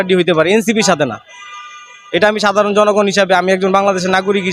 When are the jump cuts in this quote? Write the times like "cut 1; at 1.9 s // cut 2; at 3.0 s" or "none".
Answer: none